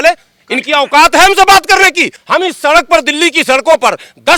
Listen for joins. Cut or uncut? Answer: uncut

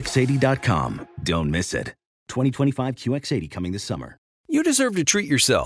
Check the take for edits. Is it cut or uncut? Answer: cut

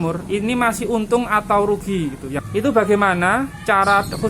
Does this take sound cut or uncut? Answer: cut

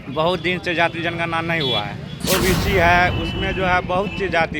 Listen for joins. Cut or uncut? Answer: cut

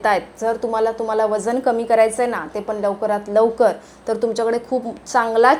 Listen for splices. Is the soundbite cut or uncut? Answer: uncut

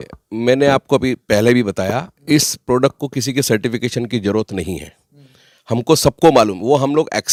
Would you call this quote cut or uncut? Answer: uncut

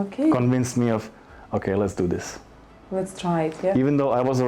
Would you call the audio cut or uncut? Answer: uncut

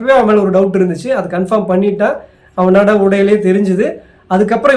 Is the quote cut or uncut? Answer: uncut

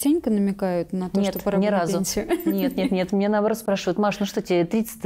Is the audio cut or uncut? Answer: uncut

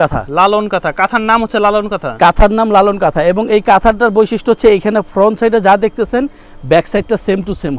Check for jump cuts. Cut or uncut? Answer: uncut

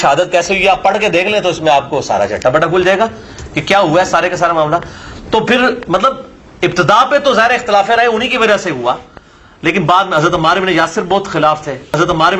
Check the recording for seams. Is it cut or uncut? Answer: uncut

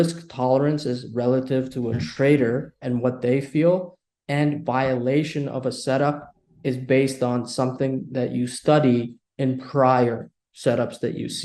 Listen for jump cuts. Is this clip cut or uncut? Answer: uncut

